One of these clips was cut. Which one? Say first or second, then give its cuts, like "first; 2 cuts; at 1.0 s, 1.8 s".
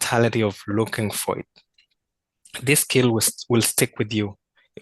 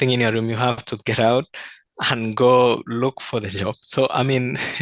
first; 1 cut; at 1.6 s